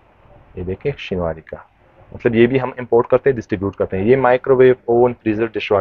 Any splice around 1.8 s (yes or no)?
no